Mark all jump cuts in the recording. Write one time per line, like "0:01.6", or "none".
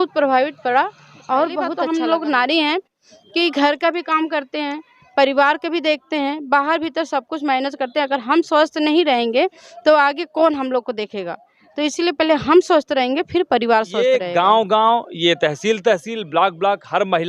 0:01.8
0:14.0

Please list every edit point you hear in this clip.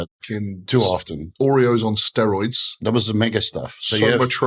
0:01.2
0:02.7

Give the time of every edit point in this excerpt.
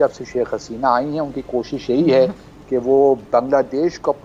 none

